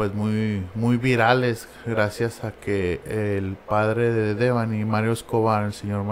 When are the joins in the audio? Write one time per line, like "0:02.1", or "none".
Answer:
none